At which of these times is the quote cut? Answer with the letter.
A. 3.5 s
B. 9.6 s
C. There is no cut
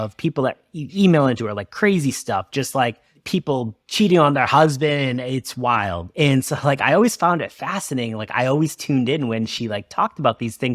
A